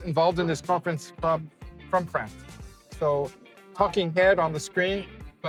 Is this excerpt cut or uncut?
uncut